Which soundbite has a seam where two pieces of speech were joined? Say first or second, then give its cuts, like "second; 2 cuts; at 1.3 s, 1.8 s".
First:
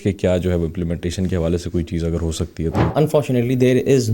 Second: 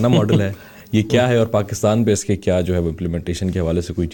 first; 1 cut; at 2.8 s